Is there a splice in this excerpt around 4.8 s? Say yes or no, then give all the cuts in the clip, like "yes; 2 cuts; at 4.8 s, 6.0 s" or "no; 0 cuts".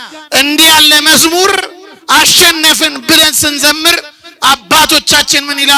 no; 0 cuts